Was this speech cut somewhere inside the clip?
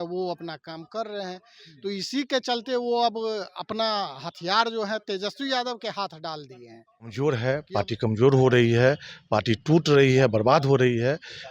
yes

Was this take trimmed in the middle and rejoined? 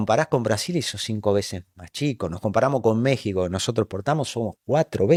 no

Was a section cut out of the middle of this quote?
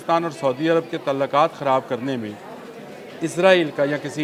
no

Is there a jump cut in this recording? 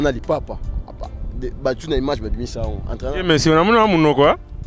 no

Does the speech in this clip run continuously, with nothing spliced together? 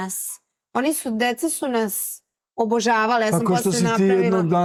yes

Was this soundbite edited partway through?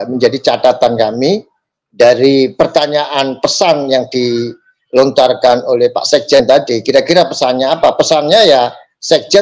no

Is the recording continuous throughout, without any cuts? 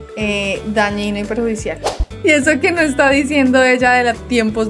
no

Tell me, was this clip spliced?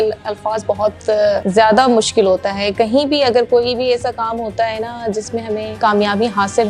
yes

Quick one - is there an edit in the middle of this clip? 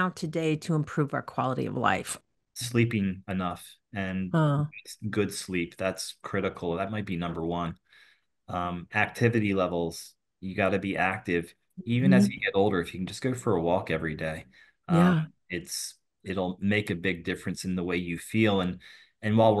yes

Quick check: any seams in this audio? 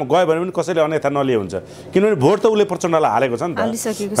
no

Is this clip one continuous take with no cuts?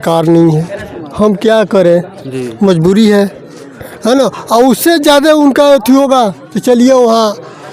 yes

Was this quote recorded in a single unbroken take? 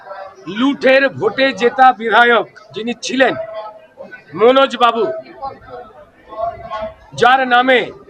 yes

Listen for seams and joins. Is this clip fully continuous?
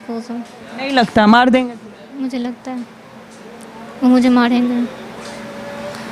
yes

